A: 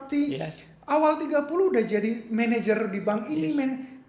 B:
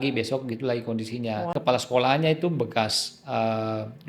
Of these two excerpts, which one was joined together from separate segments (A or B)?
B